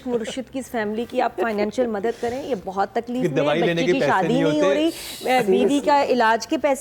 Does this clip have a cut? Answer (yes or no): no